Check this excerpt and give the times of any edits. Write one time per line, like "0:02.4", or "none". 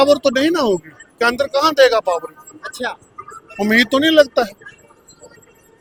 none